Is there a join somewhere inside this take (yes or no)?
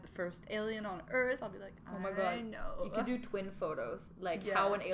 no